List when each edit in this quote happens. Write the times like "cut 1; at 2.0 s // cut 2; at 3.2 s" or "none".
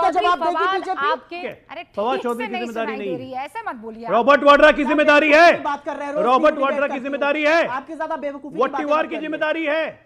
cut 1; at 1.4 s